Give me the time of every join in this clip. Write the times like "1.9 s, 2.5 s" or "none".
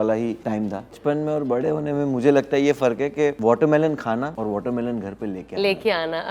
0.9 s, 3.4 s, 4.3 s